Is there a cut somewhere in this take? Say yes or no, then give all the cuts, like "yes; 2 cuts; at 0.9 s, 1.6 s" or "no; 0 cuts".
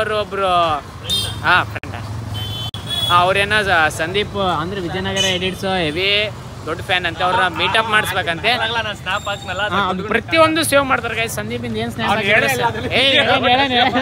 no; 0 cuts